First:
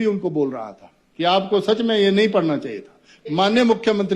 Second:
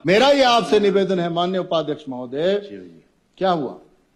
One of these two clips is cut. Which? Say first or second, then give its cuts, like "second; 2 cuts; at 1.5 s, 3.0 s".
first; 1 cut; at 3.2 s